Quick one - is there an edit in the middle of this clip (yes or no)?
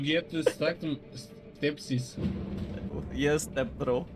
yes